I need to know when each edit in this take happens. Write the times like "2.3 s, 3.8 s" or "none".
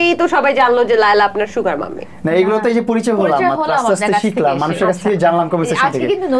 none